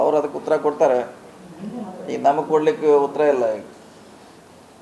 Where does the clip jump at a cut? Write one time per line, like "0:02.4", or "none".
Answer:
none